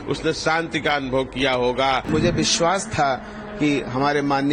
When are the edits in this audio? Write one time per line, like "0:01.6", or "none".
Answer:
0:02.1